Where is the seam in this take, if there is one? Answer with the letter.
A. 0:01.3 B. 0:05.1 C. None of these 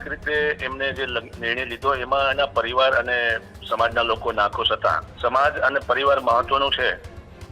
B